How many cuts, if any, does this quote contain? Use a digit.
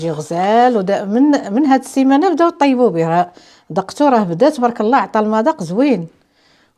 0